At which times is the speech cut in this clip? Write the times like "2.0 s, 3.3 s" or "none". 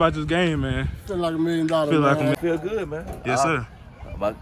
2.4 s